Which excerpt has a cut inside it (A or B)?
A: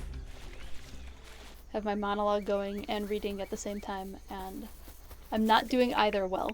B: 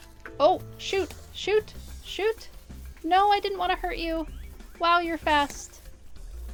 A